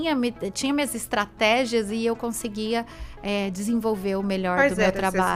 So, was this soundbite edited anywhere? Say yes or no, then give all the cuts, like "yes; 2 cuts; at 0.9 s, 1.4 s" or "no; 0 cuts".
no; 0 cuts